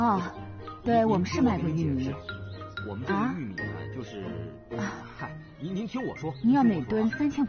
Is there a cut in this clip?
no; 0 cuts

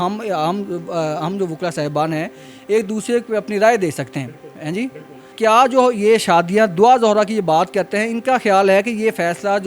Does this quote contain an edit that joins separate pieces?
yes; 1 cut; at 5.3 s

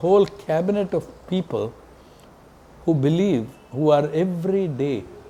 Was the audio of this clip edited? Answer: no; 0 cuts

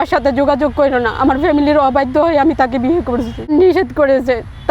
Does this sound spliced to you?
yes; 1 cut; at 3.5 s

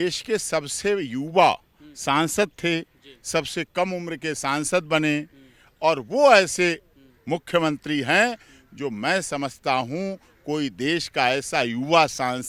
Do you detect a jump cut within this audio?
no; 0 cuts

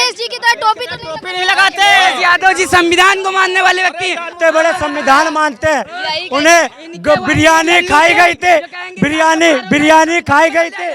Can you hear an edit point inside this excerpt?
yes; 1 cut; at 4.3 s

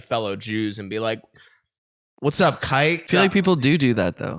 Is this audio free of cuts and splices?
no; 1 cut; at 3.0 s

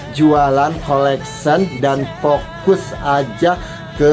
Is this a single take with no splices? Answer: yes; 0 cuts

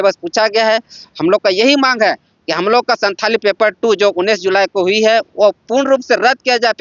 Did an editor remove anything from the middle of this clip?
no; 0 cuts

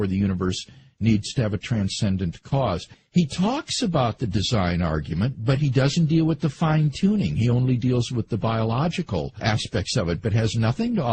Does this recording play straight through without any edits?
no; 1 cut; at 5.2 s

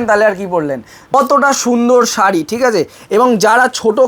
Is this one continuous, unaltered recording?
no; 1 cut; at 0.9 s

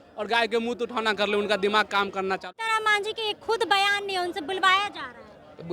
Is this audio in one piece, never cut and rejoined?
no; 1 cut; at 2.5 s

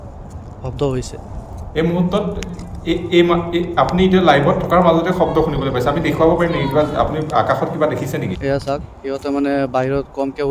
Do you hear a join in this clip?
yes; 1 cut; at 8.3 s

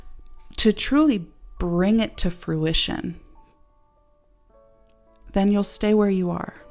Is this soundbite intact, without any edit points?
yes; 0 cuts

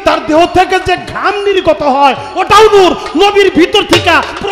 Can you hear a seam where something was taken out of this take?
no; 0 cuts

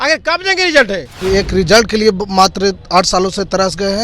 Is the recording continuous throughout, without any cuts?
no; 1 cut; at 1.1 s

